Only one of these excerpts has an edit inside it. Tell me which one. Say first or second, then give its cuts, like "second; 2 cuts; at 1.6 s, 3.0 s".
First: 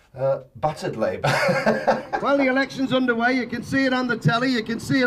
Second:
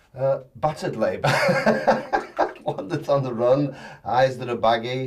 first; 1 cut; at 2.1 s